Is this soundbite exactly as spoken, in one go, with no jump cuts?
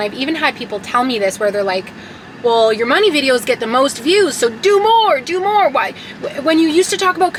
yes; 0 cuts

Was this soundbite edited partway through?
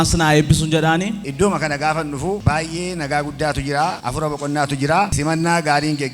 yes; 4 cuts; at 1.2 s, 2.4 s, 4.0 s, 5.1 s

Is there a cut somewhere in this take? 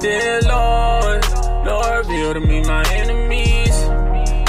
no; 0 cuts

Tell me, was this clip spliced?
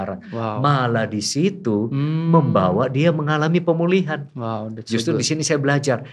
no; 0 cuts

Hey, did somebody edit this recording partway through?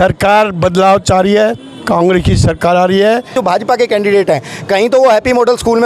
yes; 1 cut; at 3.4 s

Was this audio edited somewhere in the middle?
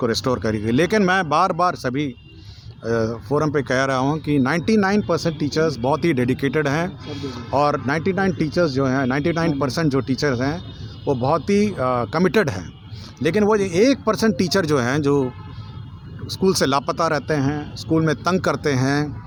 no; 0 cuts

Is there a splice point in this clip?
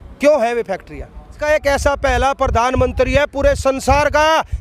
yes; 1 cut; at 1.4 s

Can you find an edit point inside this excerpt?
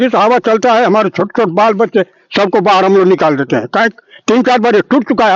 no; 0 cuts

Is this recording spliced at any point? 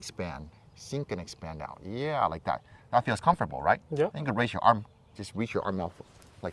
no; 0 cuts

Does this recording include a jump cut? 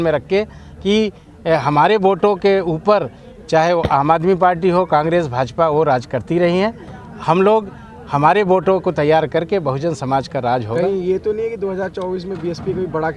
no; 0 cuts

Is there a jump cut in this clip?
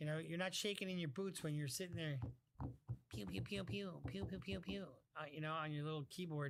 no; 0 cuts

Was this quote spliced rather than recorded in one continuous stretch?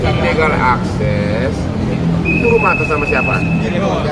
no; 0 cuts

